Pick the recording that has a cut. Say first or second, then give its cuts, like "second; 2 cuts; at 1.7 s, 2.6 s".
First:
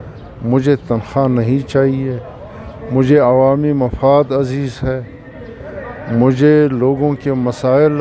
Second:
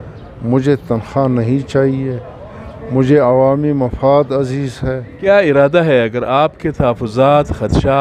second; 1 cut; at 5.3 s